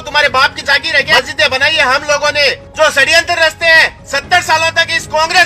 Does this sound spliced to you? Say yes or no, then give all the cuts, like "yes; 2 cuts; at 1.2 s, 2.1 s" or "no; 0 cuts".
yes; 2 cuts; at 1.1 s, 2.6 s